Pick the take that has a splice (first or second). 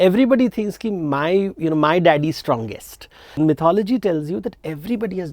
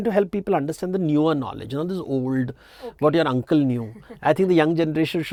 first